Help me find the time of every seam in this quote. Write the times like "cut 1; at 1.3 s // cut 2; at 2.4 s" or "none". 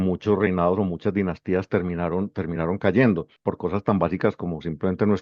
cut 1; at 3.3 s